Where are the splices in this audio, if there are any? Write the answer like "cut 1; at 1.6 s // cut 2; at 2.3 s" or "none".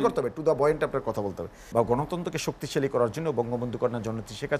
cut 1; at 1.6 s